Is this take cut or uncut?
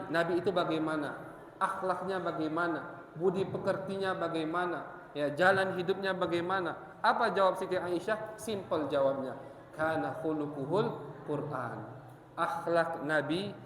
uncut